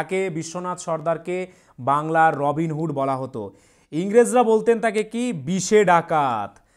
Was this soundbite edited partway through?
no; 0 cuts

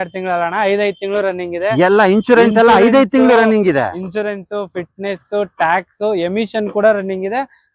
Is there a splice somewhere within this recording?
no; 0 cuts

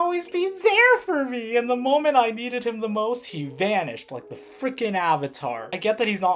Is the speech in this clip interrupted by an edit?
no; 0 cuts

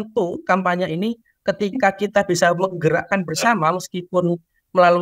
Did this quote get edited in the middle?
no; 0 cuts

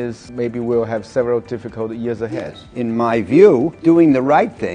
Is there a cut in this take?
yes; 2 cuts; at 2.4 s, 3.7 s

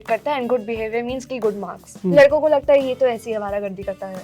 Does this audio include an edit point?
no; 0 cuts

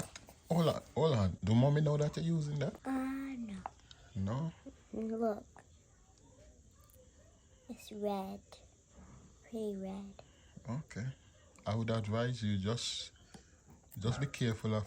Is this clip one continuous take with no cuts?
no; 2 cuts; at 1.4 s, 2.8 s

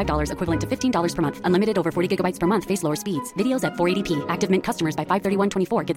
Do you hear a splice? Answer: no; 0 cuts

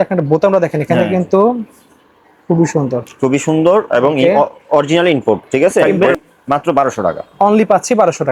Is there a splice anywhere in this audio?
yes; 1 cut; at 6.2 s

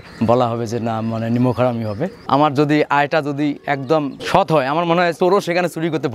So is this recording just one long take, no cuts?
no; 3 cuts; at 2.2 s, 4.2 s, 5.1 s

